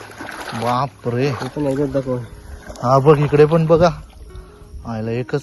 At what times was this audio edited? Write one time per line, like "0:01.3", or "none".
none